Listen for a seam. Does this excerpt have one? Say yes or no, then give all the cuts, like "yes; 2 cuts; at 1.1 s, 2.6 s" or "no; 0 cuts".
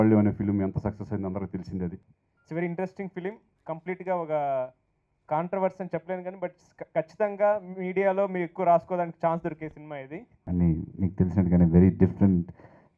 yes; 2 cuts; at 2.1 s, 10.4 s